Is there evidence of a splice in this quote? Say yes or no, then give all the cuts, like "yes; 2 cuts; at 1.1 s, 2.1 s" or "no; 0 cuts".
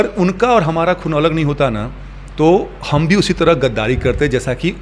no; 0 cuts